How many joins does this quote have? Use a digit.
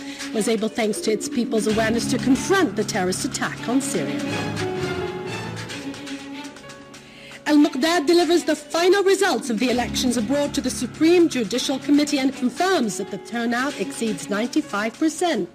1